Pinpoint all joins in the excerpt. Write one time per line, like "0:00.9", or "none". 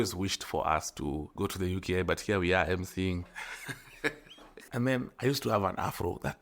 0:01.3
0:04.7